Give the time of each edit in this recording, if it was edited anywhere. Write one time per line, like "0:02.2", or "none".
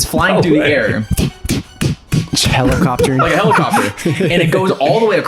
0:01.1